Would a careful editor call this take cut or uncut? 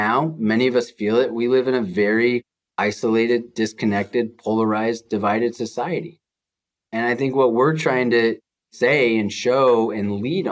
uncut